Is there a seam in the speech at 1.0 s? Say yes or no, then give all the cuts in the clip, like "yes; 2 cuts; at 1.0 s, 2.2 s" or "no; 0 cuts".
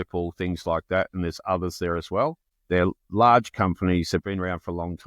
no; 1 cut; at 2.5 s